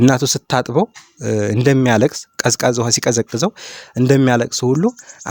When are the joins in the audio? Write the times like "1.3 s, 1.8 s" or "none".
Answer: none